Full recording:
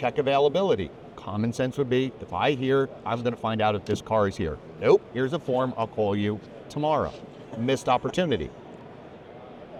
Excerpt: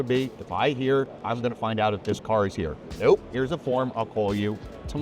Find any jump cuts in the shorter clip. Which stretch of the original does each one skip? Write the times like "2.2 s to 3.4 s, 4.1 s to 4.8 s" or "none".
none